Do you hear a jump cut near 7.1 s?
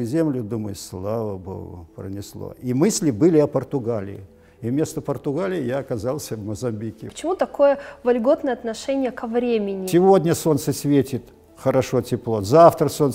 yes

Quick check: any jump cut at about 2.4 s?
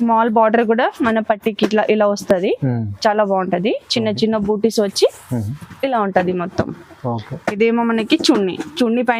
no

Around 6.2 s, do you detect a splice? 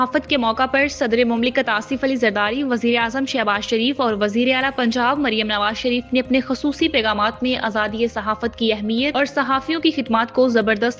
no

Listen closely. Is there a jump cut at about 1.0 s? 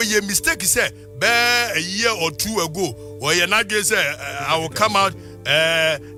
no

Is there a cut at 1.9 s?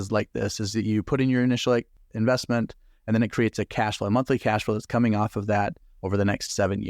yes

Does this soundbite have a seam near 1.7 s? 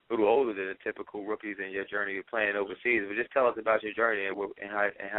no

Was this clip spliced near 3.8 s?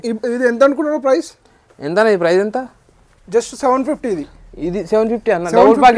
no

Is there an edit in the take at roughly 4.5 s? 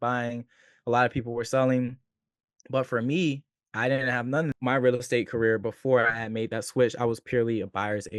yes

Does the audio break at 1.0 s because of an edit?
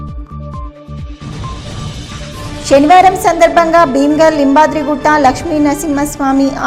no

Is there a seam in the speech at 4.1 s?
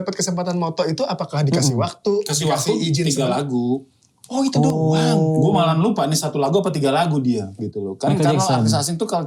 no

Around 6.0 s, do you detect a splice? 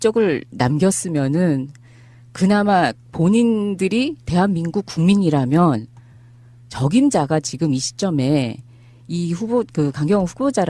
no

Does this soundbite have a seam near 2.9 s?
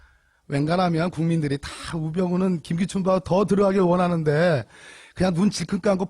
no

